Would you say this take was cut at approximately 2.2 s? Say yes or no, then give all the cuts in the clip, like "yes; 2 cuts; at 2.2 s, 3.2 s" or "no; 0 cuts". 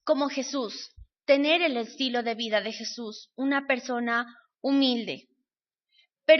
no; 1 cut; at 3.8 s